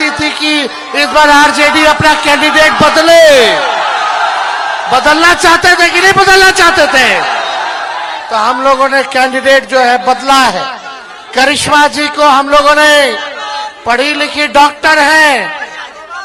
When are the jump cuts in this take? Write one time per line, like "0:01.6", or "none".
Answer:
none